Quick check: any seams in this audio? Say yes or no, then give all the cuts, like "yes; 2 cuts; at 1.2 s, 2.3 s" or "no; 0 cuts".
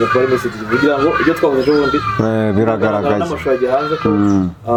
no; 0 cuts